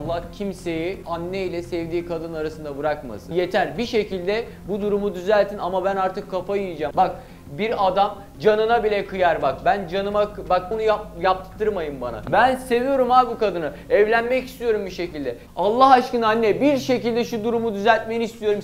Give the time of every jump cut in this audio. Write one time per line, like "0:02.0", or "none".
0:01.0
0:03.3
0:06.9
0:10.7
0:12.2